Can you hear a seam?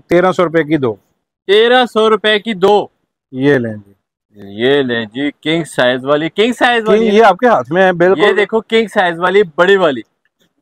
no; 0 cuts

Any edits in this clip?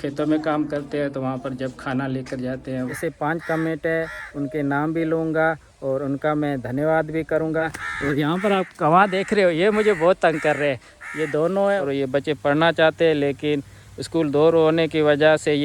yes; 3 cuts; at 2.9 s, 7.8 s, 11.8 s

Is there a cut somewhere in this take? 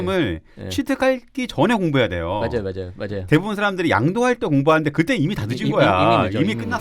no; 0 cuts

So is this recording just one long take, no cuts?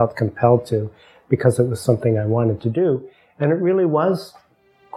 yes; 0 cuts

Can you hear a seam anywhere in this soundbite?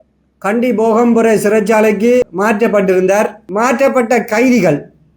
yes; 2 cuts; at 2.3 s, 3.4 s

